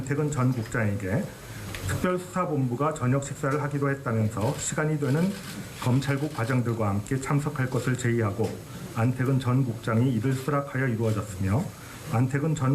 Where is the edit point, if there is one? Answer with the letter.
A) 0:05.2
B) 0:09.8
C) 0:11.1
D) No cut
A